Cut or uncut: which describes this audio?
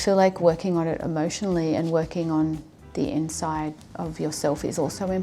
cut